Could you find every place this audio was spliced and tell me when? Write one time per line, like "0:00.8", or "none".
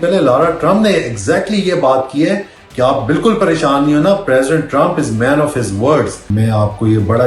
0:06.2